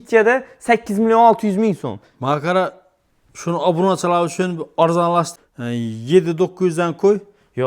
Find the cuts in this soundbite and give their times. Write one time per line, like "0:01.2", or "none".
0:05.3